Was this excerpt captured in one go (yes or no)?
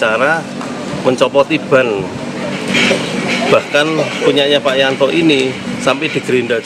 no